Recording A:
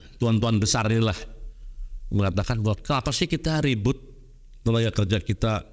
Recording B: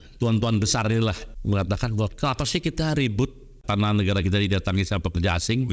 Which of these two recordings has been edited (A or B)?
B